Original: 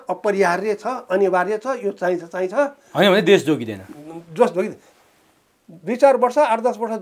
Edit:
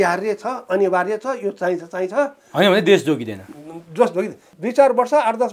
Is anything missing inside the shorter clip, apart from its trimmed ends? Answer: yes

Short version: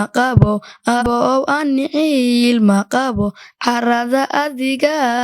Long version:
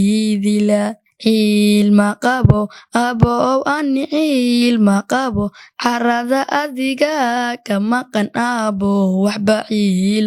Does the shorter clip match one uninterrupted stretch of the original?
no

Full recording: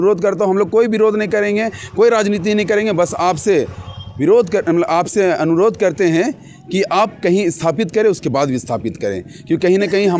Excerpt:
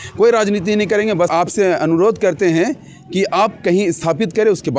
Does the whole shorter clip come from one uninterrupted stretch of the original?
no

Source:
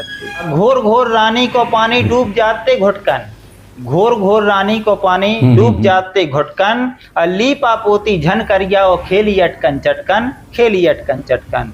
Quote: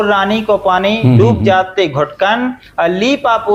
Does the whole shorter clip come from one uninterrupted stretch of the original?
yes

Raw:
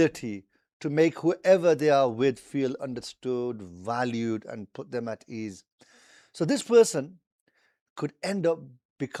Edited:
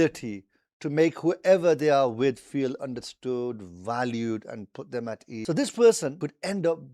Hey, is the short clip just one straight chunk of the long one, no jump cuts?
no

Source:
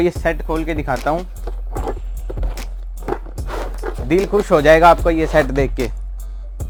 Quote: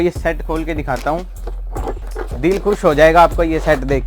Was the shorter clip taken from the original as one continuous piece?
no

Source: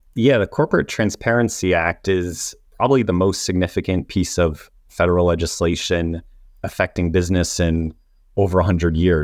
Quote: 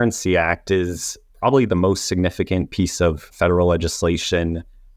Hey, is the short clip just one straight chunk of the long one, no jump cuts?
no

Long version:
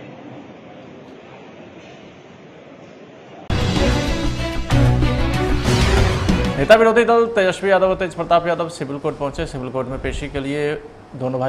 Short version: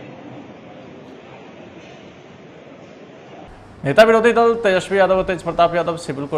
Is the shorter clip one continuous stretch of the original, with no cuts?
no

